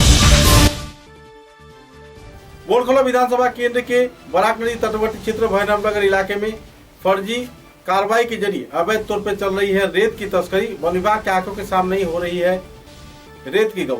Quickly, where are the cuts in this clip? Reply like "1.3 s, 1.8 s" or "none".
2.1 s